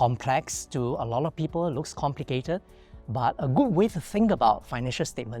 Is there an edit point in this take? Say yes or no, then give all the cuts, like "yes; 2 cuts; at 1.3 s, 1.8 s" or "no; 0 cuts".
no; 0 cuts